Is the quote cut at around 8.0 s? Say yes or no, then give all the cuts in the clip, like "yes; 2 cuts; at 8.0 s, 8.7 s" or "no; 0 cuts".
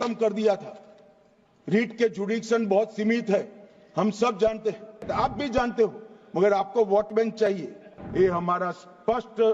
yes; 2 cuts; at 5.0 s, 8.0 s